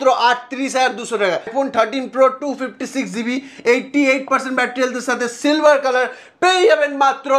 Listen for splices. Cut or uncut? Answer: cut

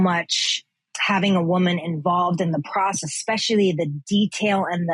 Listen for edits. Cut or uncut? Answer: uncut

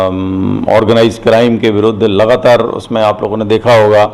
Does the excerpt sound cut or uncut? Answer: uncut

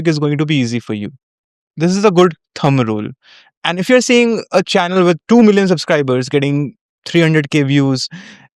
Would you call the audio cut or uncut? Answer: uncut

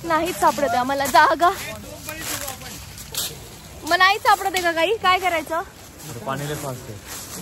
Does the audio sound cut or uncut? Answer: uncut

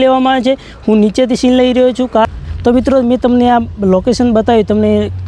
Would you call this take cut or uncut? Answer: cut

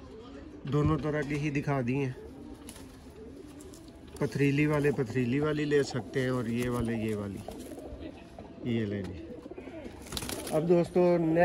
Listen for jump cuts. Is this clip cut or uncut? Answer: uncut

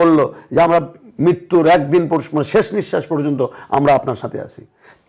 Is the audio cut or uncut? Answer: uncut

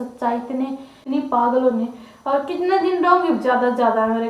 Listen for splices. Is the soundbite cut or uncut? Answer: cut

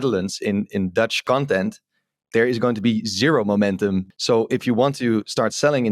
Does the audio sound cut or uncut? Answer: cut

